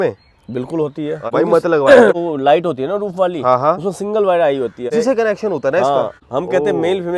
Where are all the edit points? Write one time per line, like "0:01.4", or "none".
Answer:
0:01.2
0:02.2
0:04.9
0:06.2